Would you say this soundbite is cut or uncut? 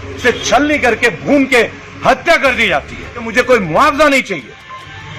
cut